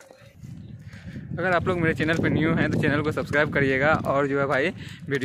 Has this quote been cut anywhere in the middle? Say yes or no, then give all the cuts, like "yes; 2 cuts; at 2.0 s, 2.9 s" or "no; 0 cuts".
no; 0 cuts